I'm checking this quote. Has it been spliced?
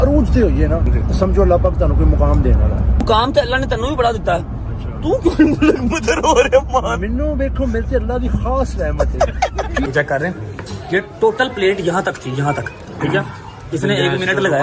yes; 3 cuts; at 0.9 s, 3.0 s, 9.9 s

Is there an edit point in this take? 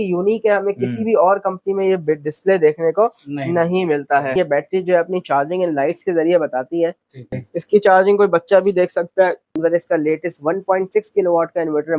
yes; 3 cuts; at 4.3 s, 7.3 s, 9.6 s

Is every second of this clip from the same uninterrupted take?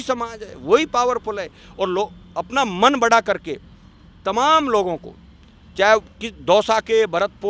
yes; 0 cuts

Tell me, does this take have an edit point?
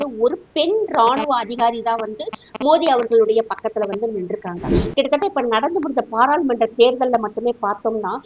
yes; 1 cut; at 4.7 s

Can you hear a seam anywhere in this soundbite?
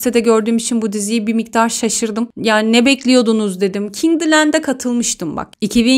no; 0 cuts

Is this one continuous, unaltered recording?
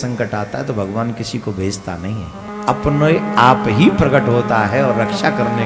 no; 1 cut; at 2.5 s

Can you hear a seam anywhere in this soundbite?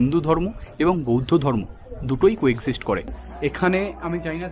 yes; 1 cut; at 3.2 s

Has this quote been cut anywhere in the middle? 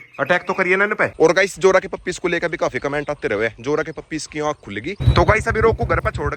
yes; 2 cuts; at 1.1 s, 5.0 s

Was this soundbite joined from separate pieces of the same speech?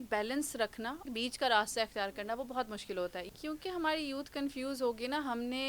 yes; 2 cuts; at 1.1 s, 3.2 s

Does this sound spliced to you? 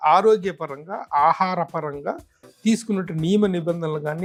no; 0 cuts

